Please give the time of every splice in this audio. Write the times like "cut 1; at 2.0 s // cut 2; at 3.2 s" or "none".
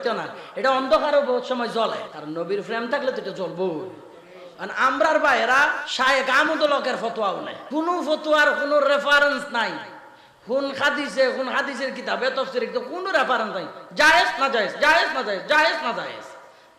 cut 1; at 2.1 s // cut 2; at 5.8 s // cut 3; at 7.5 s